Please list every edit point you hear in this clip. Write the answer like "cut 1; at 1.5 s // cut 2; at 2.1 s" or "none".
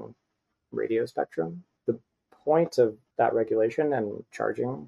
cut 1; at 1.7 s // cut 2; at 3.0 s